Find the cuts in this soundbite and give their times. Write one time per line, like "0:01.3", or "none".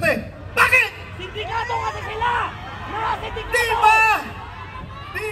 none